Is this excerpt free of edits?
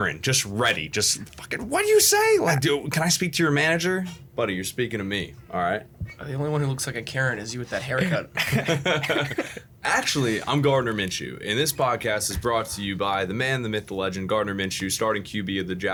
yes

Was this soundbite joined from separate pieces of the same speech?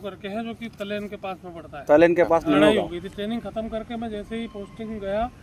yes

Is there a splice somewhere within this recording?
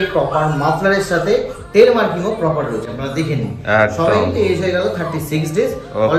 no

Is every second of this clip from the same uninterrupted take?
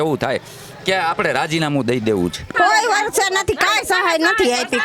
no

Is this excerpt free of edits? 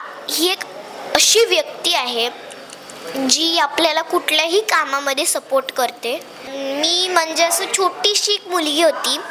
no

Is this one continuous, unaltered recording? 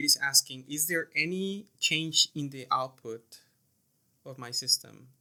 yes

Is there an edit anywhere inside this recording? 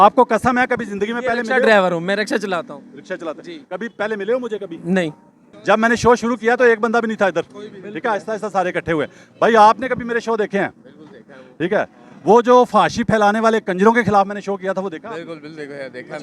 no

